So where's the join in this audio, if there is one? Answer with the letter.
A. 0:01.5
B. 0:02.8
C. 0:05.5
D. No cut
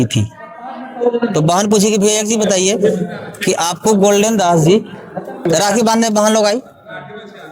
C